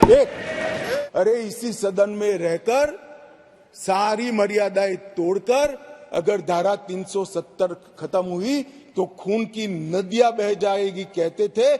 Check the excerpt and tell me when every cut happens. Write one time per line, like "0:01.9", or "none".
0:01.0